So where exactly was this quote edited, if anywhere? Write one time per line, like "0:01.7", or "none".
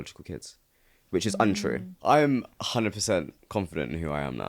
0:01.9
0:02.6